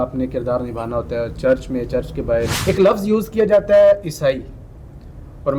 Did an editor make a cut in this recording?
yes; 1 cut; at 2.6 s

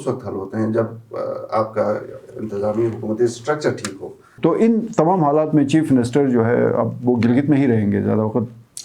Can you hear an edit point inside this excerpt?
yes; 1 cut; at 4.3 s

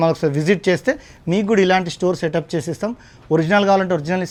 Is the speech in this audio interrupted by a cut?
no; 0 cuts

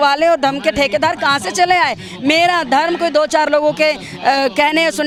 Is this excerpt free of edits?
yes; 0 cuts

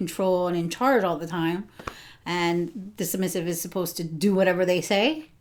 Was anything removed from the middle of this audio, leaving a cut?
no; 0 cuts

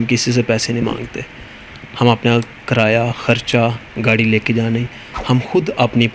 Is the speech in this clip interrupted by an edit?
no; 0 cuts

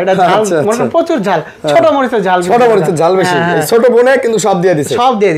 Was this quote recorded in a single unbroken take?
yes; 0 cuts

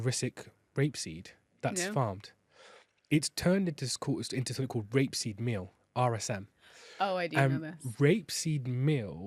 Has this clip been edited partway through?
no; 0 cuts

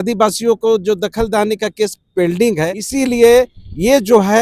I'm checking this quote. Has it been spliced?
yes; 1 cut; at 2.8 s

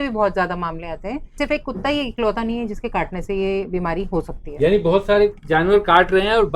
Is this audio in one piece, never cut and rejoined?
no; 1 cut; at 1.4 s

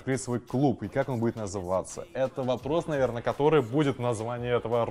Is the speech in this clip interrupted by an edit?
no; 0 cuts

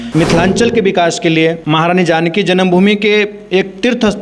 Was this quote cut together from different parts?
yes; 1 cut; at 1.6 s

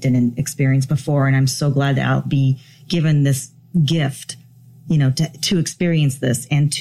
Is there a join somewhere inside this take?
no; 0 cuts

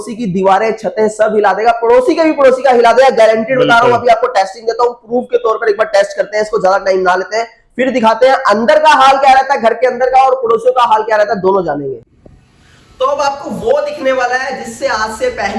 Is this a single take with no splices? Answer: yes; 0 cuts

